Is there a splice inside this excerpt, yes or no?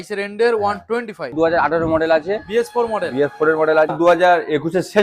yes